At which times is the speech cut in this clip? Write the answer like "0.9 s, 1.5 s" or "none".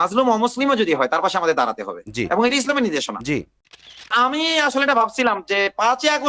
4.1 s